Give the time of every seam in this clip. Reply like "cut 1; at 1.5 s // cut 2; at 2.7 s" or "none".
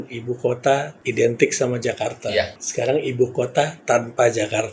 cut 1; at 1.0 s // cut 2; at 2.6 s